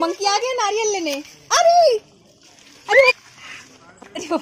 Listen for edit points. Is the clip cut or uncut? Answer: cut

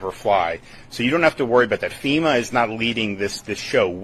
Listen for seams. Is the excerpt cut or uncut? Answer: uncut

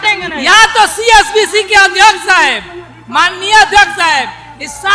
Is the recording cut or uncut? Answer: uncut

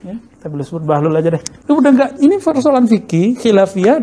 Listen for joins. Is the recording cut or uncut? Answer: cut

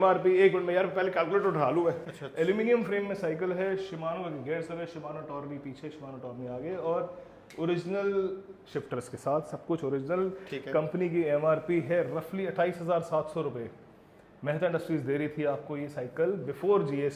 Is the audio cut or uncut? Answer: cut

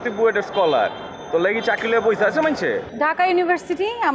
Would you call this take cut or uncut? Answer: cut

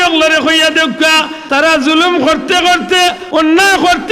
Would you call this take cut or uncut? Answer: cut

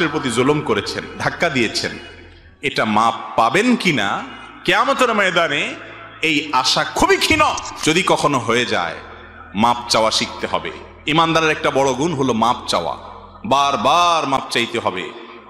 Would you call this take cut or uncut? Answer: cut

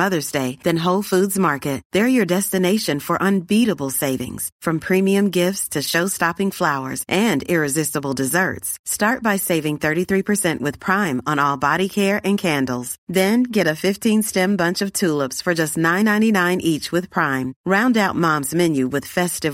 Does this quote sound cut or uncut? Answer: uncut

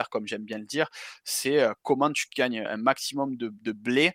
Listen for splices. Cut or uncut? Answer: uncut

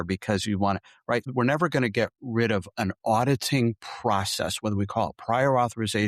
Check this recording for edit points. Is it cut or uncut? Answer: cut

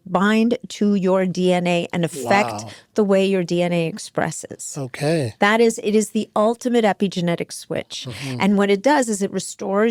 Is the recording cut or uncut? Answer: uncut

